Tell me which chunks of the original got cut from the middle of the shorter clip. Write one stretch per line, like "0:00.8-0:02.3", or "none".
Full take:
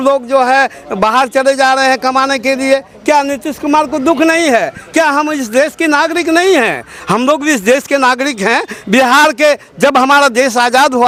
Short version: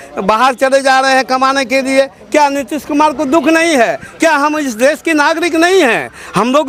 none